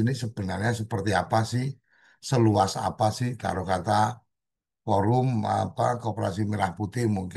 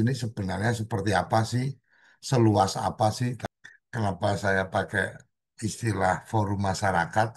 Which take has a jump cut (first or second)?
second